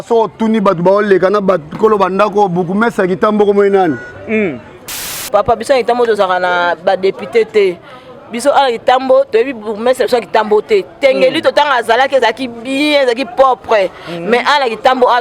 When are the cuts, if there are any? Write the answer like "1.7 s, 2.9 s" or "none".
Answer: 4.7 s